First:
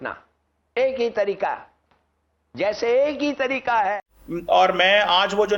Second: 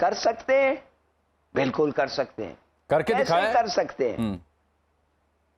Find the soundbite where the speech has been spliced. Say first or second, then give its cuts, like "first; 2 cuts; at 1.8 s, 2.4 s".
first; 1 cut; at 3.9 s